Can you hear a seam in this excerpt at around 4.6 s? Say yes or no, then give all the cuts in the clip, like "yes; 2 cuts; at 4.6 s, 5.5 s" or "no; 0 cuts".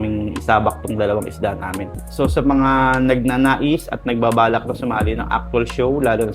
no; 1 cut; at 1.9 s